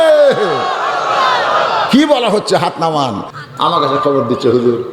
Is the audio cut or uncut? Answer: cut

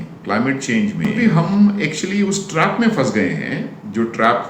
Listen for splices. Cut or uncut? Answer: cut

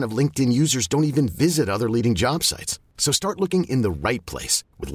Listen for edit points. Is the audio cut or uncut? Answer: uncut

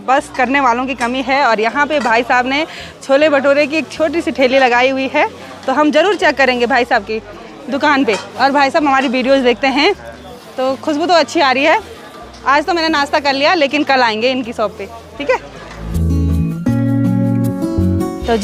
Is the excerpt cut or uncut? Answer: uncut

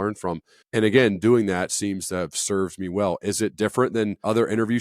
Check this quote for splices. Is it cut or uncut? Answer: cut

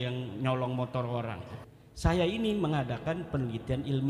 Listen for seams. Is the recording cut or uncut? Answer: cut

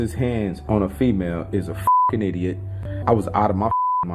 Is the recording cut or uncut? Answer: uncut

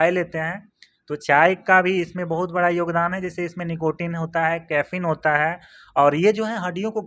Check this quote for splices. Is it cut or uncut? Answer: uncut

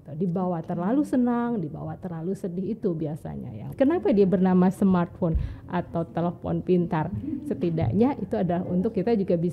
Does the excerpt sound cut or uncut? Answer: cut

